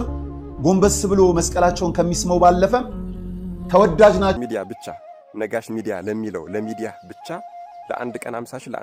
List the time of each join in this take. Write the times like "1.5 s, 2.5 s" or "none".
4.4 s